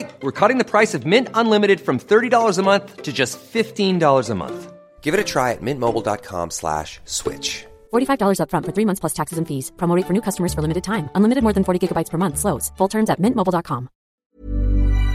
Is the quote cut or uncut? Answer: cut